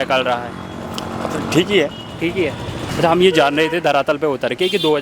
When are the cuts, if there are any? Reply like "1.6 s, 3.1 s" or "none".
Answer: 2.9 s